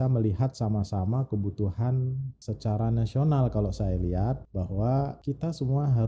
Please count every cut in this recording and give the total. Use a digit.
3